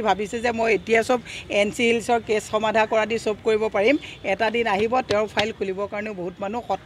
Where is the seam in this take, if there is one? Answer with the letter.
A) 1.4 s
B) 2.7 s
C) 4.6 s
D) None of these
D